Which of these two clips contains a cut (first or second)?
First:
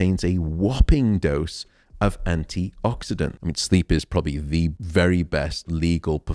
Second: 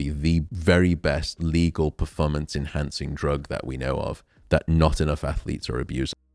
first